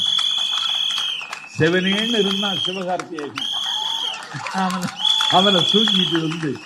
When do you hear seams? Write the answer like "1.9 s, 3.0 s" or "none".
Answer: none